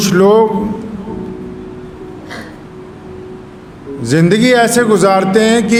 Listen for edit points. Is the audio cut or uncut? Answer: uncut